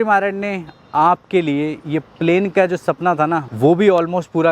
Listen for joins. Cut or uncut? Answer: cut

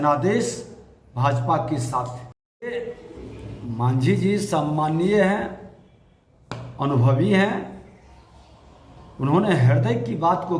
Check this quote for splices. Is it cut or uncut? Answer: uncut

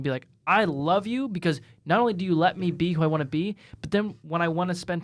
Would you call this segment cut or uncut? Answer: uncut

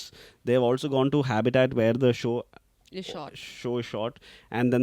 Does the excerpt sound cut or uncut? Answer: uncut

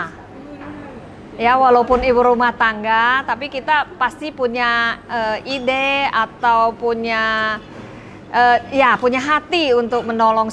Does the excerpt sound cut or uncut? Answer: uncut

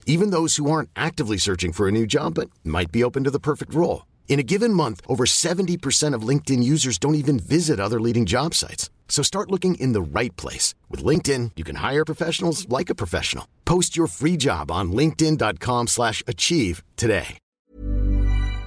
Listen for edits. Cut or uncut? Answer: cut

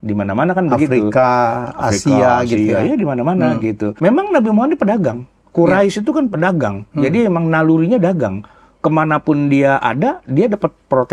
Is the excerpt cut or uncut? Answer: cut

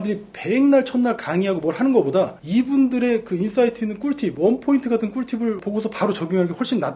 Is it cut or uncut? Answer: uncut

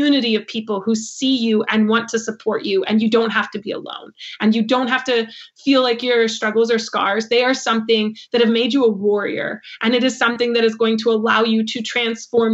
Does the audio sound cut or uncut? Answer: uncut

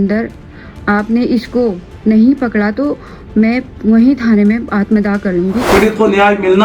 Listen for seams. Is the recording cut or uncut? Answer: cut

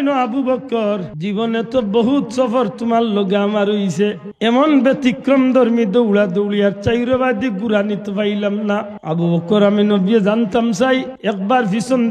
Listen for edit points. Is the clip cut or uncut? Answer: cut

